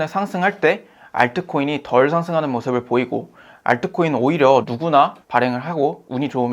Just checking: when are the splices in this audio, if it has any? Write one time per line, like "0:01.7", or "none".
0:04.7